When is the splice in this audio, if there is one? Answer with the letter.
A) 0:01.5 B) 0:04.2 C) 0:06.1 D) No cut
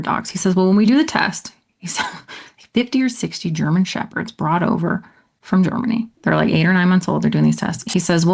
C